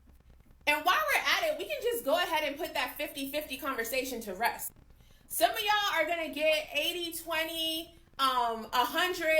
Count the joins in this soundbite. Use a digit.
1